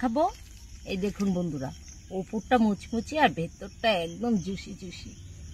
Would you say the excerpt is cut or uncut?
uncut